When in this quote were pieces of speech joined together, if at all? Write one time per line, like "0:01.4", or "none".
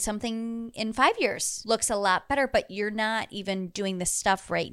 0:01.5